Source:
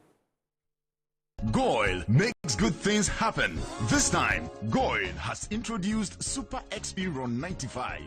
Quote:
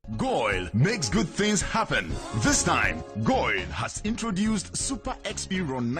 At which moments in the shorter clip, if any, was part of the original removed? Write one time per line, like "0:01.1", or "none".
0:01.0